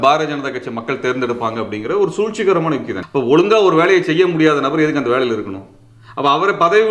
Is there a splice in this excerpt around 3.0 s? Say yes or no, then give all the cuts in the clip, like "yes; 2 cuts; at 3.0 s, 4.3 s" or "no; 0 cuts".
yes; 1 cut; at 3.0 s